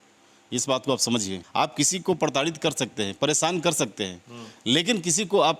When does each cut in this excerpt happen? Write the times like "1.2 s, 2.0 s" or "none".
1.4 s

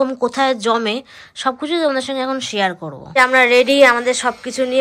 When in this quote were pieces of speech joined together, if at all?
3.1 s

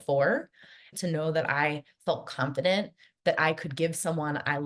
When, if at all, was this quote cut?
0.9 s

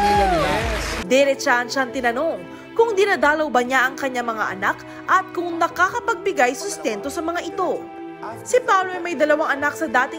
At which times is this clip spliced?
0.9 s

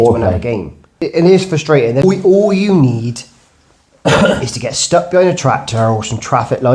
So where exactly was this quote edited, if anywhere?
0.9 s, 2.0 s

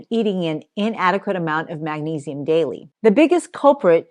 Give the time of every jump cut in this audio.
none

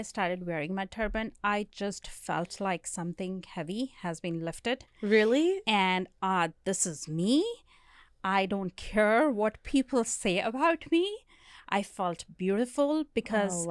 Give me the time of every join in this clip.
none

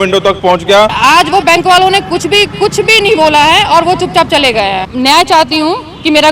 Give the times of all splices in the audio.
1.0 s, 4.9 s

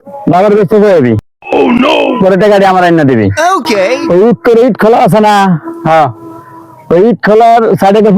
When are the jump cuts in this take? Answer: none

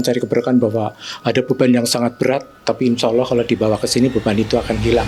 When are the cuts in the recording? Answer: none

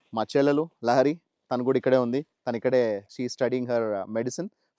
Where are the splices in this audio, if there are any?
3.1 s

